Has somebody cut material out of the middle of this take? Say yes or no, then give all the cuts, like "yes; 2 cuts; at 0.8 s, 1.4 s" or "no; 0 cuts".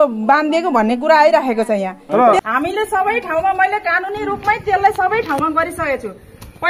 yes; 1 cut; at 2.4 s